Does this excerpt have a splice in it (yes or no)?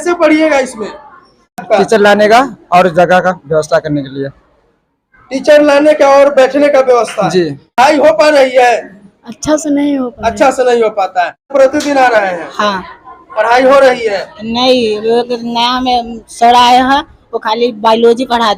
yes